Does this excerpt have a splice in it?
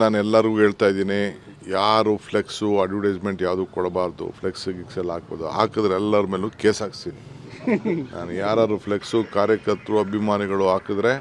no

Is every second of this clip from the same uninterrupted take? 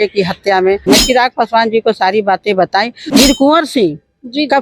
no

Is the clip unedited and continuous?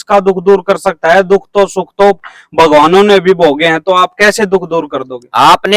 yes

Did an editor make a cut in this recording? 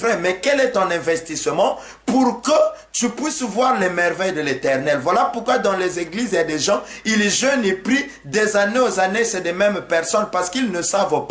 no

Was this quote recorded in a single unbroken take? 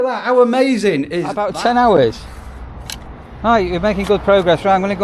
no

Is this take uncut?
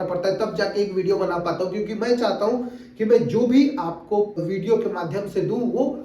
no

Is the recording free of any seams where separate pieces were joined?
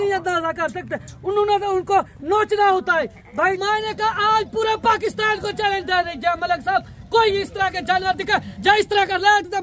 no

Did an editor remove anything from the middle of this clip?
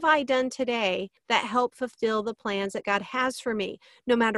yes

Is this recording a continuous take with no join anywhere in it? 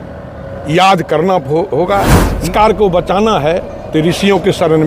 no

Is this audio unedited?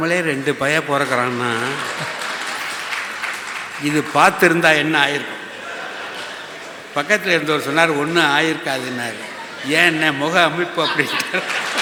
yes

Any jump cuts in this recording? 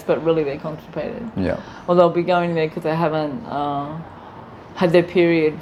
no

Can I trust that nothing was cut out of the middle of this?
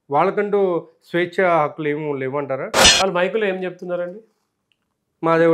no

